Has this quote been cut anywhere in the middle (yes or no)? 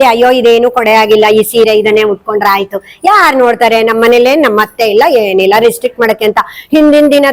no